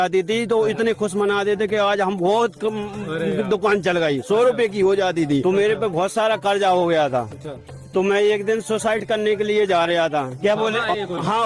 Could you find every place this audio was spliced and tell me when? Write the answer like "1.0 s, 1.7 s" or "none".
5.4 s, 10.3 s